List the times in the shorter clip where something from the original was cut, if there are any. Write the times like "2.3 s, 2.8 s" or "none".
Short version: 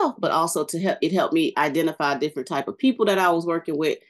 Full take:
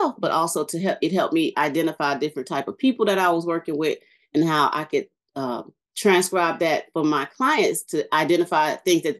none